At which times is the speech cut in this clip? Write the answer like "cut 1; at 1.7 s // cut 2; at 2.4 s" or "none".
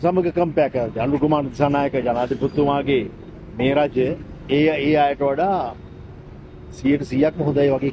none

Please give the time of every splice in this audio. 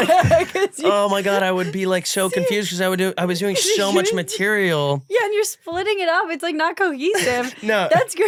none

